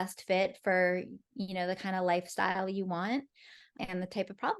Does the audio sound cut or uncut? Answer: cut